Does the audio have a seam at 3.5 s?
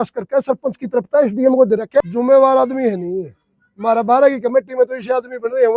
no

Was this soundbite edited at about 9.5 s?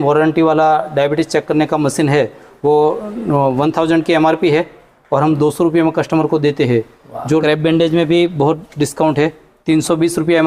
yes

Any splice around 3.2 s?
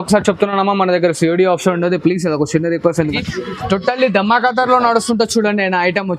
yes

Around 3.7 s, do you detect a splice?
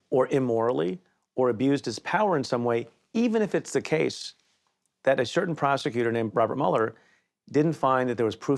no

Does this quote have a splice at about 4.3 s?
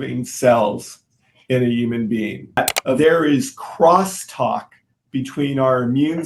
no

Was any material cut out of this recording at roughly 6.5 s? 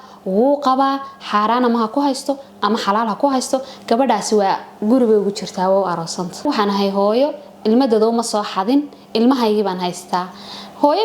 yes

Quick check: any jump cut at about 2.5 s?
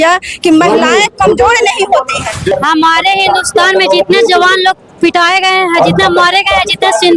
yes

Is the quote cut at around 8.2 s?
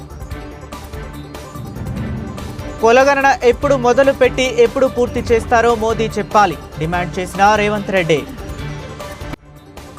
yes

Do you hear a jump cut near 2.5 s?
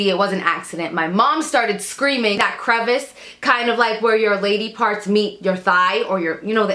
yes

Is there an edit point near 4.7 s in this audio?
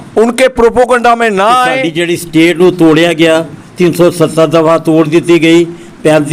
no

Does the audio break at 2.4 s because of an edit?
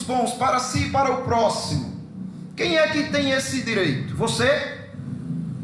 no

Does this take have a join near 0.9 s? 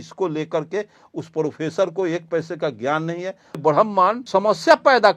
no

